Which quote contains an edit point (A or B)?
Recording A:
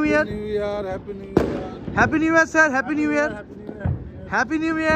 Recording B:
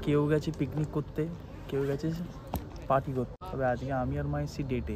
B